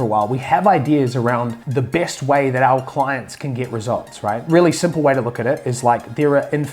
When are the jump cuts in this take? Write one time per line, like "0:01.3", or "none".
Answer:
0:01.6
0:04.4